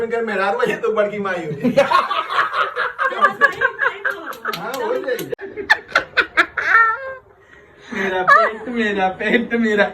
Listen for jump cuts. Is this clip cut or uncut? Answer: cut